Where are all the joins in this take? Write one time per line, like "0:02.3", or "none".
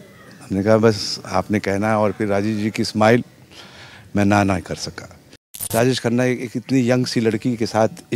0:05.5